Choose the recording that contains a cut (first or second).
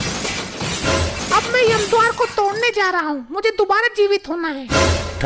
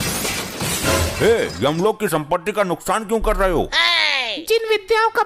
first